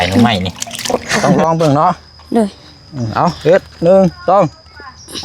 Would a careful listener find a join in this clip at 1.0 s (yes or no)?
yes